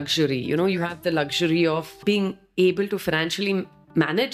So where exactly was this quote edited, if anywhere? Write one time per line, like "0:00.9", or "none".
0:02.0